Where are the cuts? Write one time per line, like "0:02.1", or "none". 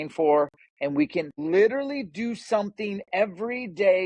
0:01.3